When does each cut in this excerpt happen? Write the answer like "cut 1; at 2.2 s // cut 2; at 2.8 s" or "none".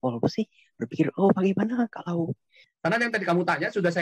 cut 1; at 2.7 s